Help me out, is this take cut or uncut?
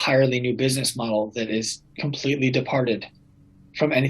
uncut